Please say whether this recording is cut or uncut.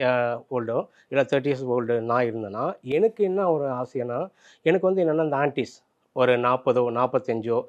uncut